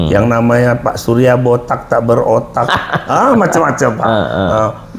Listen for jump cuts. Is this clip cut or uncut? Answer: uncut